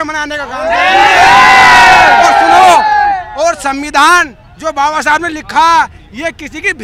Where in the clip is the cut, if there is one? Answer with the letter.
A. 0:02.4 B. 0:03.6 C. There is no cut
C